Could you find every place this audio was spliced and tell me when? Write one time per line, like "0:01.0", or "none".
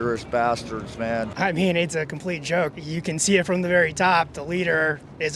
0:01.3
0:02.7